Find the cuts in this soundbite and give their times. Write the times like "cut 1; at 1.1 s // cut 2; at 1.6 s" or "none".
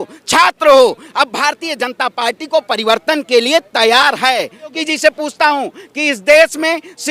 cut 1; at 4.7 s